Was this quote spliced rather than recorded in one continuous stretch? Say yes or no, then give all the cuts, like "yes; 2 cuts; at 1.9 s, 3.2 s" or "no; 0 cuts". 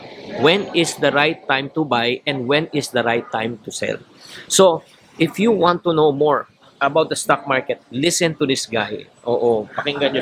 no; 0 cuts